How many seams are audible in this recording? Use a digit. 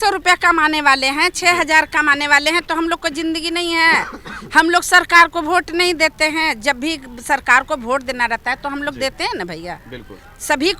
0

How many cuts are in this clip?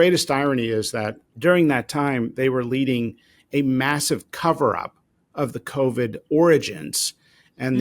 1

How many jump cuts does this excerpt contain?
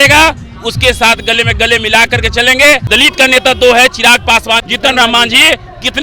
2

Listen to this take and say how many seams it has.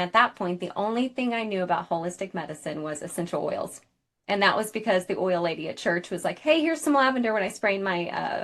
0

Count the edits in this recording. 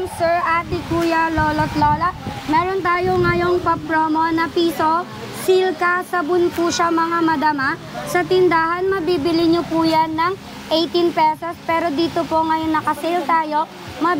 0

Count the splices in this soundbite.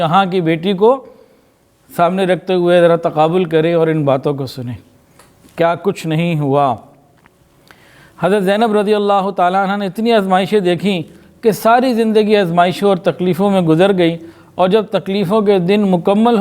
0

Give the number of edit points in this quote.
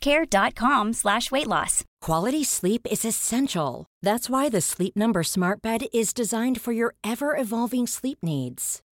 1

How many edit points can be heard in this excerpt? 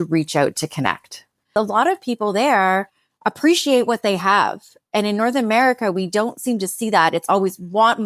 1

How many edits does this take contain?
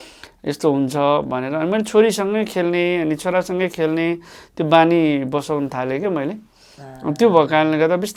0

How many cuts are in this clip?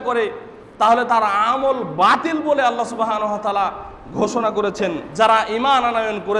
1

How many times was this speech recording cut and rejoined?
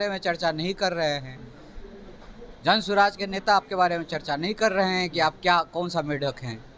0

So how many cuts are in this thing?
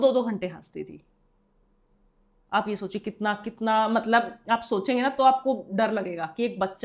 0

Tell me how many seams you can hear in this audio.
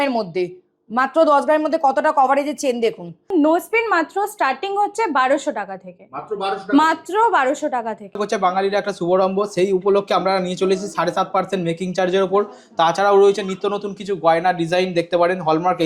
2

